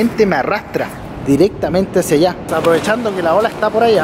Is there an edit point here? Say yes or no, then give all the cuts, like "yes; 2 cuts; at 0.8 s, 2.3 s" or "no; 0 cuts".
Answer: yes; 1 cut; at 2.5 s